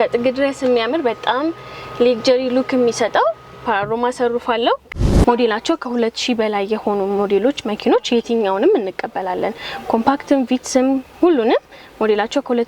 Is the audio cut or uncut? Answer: cut